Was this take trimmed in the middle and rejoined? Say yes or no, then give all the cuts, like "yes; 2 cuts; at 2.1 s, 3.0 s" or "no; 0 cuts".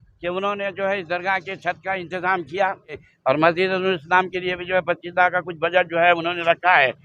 yes; 1 cut; at 3.1 s